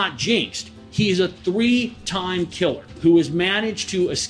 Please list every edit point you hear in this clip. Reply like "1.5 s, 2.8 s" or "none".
2.9 s

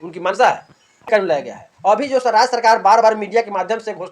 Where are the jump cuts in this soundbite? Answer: 1.1 s

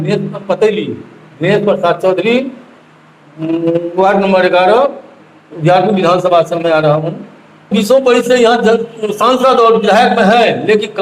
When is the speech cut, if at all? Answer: 7.7 s

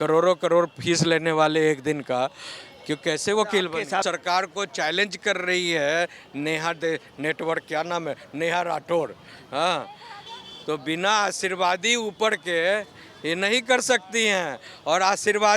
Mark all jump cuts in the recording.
4.1 s

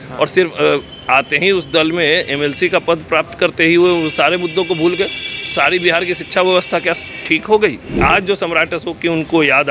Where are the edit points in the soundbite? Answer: 7.9 s

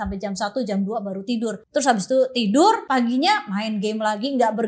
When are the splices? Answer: 1.6 s, 2.8 s

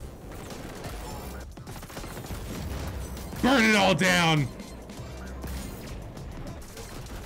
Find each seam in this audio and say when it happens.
1.5 s

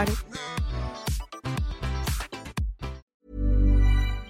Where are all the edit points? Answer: 3.0 s

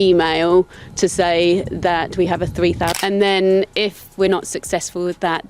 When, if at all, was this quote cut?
2.9 s

